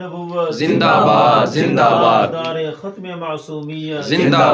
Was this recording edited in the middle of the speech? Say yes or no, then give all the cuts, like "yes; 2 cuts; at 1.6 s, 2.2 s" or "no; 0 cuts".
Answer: no; 0 cuts